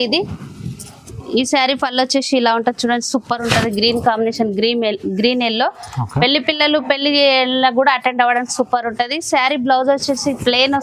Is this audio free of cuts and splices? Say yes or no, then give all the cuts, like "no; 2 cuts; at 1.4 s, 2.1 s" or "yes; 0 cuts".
yes; 0 cuts